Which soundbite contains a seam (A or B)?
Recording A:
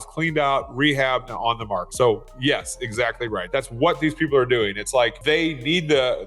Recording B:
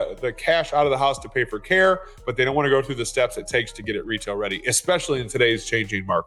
A